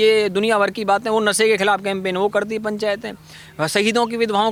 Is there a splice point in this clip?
no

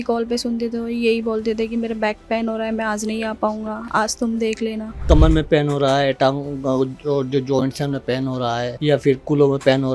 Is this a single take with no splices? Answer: no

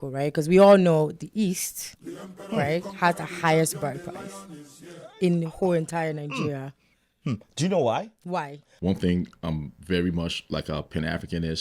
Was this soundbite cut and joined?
yes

